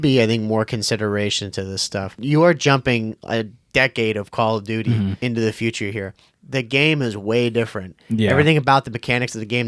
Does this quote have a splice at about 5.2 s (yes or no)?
yes